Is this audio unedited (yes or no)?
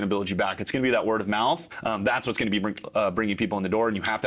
no